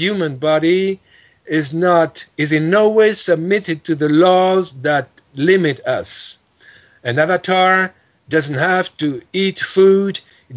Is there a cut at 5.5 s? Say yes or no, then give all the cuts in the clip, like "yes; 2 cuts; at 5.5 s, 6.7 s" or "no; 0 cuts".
no; 1 cut; at 2.2 s